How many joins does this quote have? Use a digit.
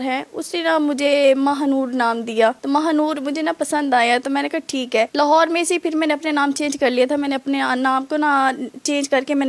0